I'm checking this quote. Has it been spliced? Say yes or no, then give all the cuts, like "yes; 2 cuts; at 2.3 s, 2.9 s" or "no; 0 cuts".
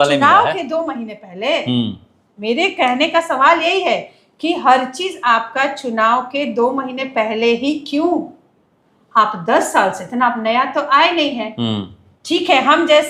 no; 0 cuts